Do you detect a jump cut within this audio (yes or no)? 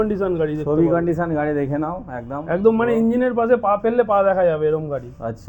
no